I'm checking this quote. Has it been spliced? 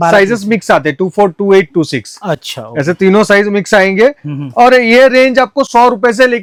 no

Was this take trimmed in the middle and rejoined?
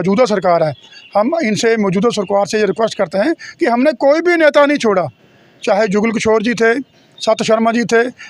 no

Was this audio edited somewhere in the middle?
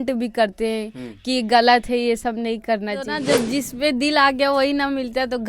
yes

